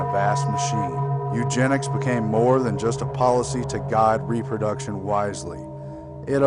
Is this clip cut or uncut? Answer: uncut